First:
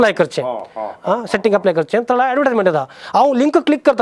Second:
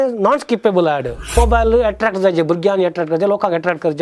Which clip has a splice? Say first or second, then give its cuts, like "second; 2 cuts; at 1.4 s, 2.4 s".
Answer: second; 1 cut; at 1.3 s